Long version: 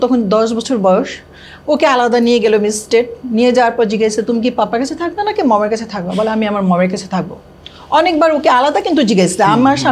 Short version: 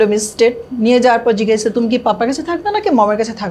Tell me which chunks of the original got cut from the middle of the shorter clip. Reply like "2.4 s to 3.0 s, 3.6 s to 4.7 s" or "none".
none